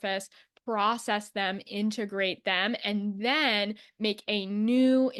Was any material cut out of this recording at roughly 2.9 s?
no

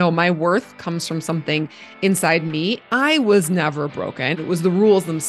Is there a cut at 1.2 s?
no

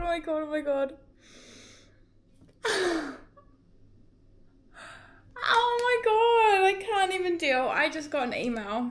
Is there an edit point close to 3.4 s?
no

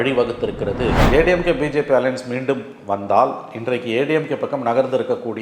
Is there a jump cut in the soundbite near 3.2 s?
no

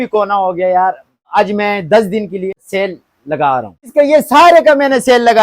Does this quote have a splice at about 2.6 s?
yes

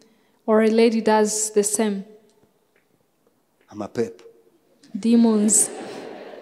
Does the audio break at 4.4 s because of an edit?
no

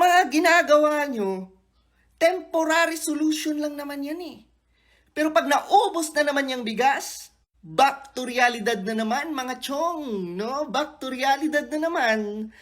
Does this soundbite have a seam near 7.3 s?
no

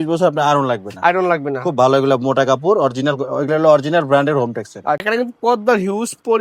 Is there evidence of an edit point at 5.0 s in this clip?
yes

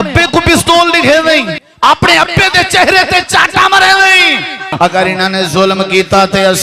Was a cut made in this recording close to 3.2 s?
no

